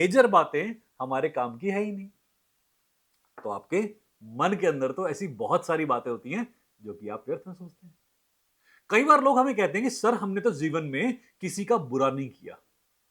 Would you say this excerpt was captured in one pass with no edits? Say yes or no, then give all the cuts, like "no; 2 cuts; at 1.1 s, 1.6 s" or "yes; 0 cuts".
yes; 0 cuts